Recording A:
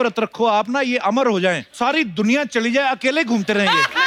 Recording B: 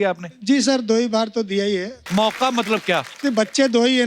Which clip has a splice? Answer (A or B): B